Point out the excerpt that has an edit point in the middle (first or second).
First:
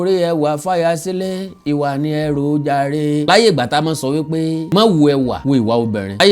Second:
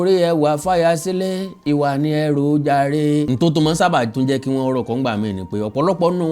second